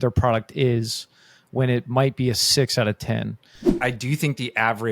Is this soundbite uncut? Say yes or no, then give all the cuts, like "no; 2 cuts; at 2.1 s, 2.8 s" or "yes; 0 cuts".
no; 1 cut; at 3.7 s